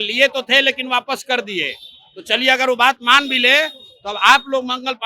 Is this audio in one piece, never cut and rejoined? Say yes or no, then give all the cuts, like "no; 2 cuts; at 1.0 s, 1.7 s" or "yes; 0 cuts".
yes; 0 cuts